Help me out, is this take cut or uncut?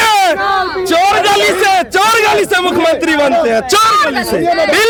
uncut